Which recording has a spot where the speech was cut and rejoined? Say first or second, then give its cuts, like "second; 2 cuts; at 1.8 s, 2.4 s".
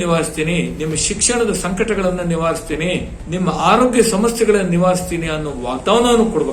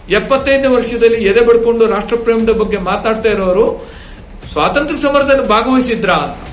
first; 1 cut; at 3.2 s